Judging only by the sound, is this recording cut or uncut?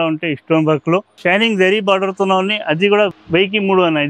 cut